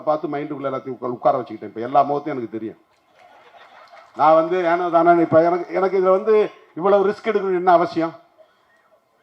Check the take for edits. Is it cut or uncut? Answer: uncut